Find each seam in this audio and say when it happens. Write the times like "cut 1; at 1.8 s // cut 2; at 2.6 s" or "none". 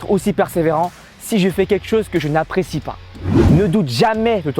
cut 1; at 3.3 s